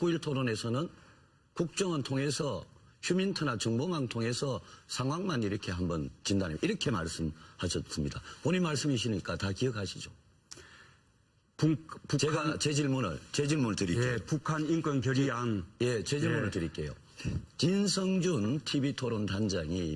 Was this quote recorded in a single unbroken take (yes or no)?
no